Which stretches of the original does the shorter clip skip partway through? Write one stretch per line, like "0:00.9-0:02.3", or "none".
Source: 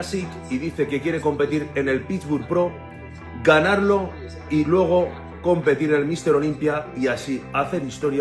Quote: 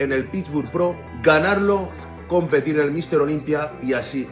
0:02.8-0:03.3
0:04.3-0:05.2